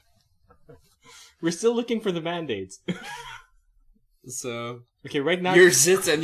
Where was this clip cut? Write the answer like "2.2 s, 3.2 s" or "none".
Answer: 3.6 s